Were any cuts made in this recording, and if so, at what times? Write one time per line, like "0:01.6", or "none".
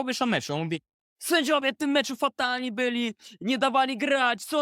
none